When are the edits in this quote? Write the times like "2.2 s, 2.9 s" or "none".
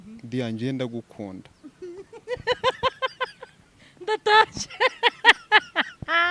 none